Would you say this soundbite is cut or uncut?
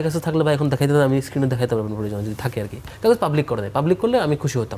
uncut